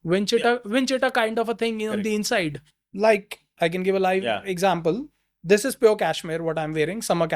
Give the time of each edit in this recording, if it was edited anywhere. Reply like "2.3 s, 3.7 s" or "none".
2.7 s

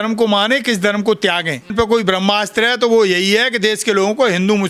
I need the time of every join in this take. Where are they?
1.7 s

